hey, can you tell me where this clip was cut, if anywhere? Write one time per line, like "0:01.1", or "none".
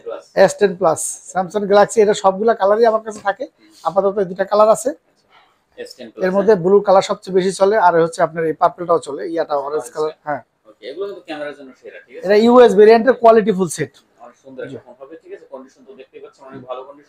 none